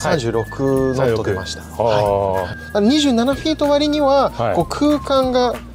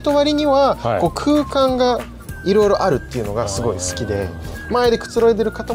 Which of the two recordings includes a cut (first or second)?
first